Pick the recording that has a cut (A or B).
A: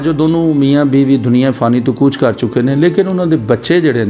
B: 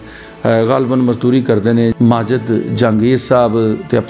B